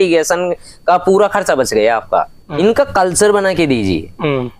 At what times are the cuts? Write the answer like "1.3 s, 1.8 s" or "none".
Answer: 2.4 s